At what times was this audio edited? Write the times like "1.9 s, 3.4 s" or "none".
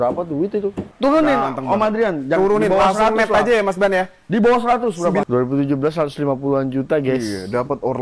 0.9 s, 5.2 s